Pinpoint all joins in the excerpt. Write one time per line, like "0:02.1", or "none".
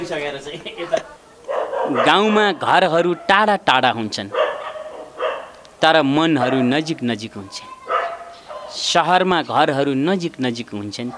0:01.2